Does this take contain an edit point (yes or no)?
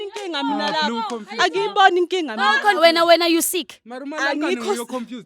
yes